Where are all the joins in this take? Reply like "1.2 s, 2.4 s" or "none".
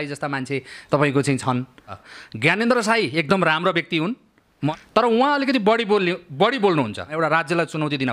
1.9 s, 4.7 s, 7.2 s